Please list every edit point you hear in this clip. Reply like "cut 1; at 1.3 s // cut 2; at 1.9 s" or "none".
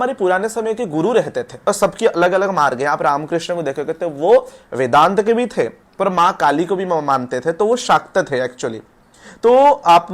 cut 1; at 1.5 s